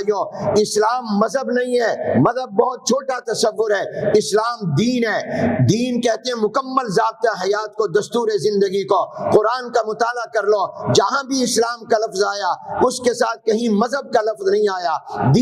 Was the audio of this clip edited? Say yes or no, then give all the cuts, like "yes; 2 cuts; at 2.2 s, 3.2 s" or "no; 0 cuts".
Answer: no; 0 cuts